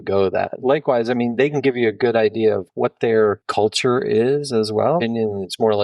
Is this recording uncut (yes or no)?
no